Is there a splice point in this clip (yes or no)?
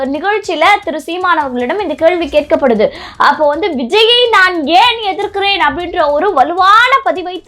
no